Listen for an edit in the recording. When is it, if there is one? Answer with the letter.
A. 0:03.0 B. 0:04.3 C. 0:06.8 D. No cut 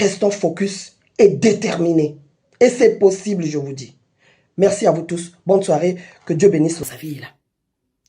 C